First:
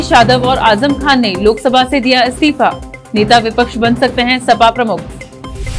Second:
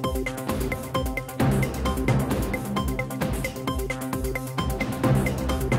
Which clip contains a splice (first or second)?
second